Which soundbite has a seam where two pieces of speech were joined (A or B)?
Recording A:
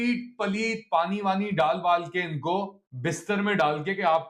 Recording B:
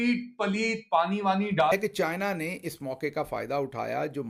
A